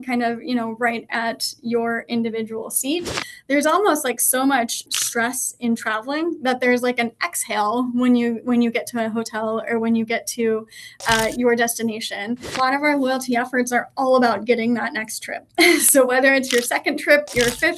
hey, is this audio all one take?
no; 3 cuts; at 3.3 s, 4.9 s, 12.6 s

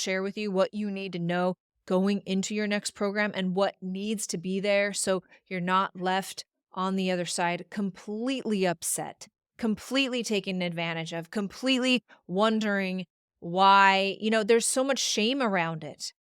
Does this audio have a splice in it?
no; 0 cuts

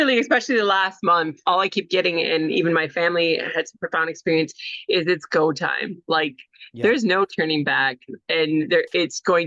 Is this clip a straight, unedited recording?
yes; 0 cuts

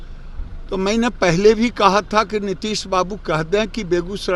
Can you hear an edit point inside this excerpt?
no; 0 cuts

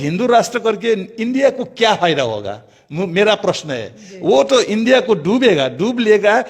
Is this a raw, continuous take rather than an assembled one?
yes; 0 cuts

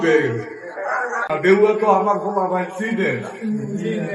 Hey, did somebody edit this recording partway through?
yes; 1 cut; at 1.3 s

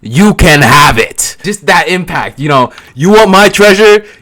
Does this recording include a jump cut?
yes; 2 cuts; at 1.3 s, 2.8 s

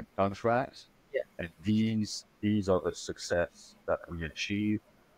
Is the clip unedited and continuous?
yes; 0 cuts

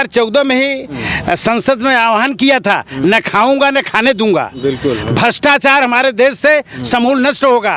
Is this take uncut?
yes; 0 cuts

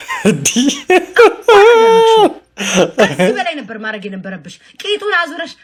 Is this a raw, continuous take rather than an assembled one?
yes; 0 cuts

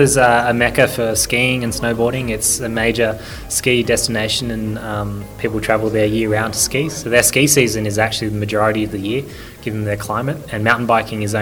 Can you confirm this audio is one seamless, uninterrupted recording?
yes; 0 cuts

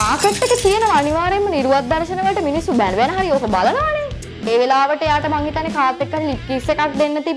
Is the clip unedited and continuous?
no; 1 cut; at 4.4 s

